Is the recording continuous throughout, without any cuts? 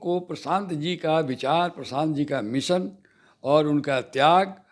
yes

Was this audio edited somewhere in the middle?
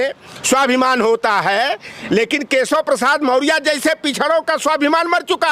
no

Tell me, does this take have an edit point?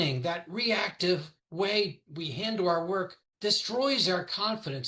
yes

